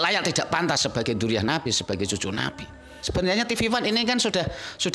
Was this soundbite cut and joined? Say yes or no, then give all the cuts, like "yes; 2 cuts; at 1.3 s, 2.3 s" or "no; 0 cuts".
yes; 1 cut; at 3.1 s